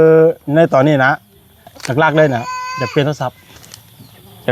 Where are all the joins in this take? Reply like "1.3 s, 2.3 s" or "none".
1.8 s